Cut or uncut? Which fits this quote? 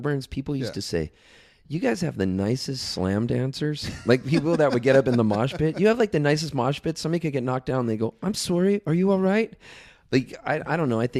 uncut